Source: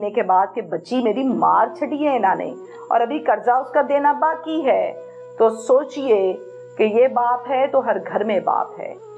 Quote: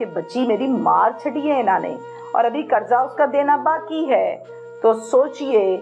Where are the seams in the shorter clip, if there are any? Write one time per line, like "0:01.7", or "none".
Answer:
none